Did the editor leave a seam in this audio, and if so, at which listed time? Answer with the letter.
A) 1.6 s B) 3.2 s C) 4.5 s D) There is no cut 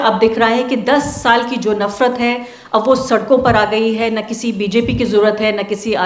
D